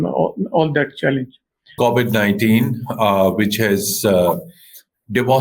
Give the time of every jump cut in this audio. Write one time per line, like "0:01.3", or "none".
0:01.7